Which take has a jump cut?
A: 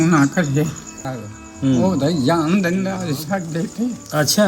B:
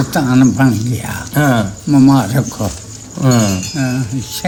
A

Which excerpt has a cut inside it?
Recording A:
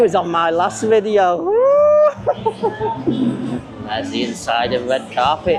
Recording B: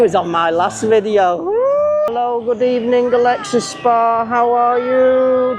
B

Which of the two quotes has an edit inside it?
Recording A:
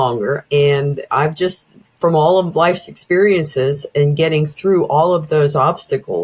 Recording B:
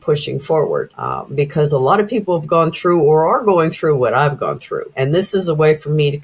B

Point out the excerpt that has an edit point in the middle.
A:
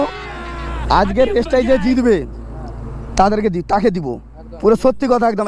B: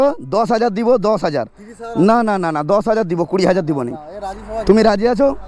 A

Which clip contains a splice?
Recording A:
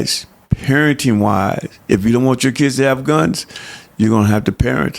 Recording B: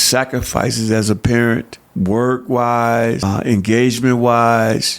B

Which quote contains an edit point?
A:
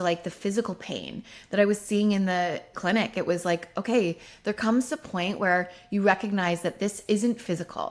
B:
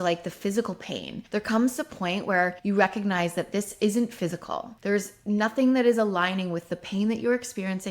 B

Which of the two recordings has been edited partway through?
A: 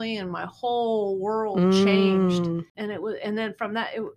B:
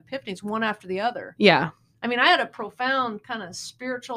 A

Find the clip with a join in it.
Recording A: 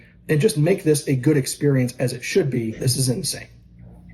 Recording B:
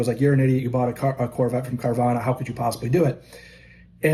A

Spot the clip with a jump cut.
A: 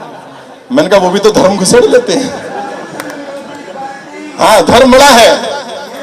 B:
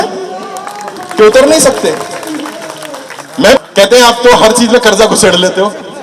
B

